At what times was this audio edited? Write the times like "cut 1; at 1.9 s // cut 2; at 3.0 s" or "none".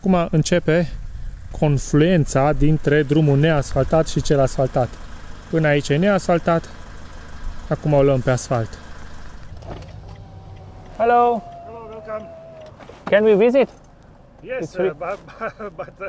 cut 1; at 9.4 s

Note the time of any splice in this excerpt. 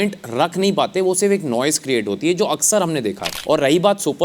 cut 1; at 3.3 s

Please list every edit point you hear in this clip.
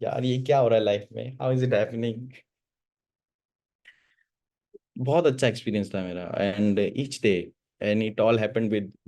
none

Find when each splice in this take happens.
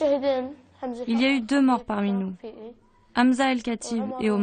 cut 1; at 0.9 s

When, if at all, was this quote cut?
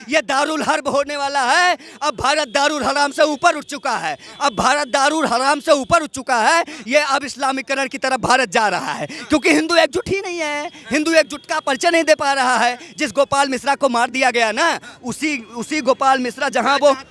none

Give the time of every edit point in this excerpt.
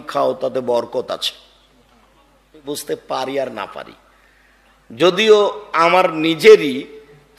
cut 1; at 2.6 s

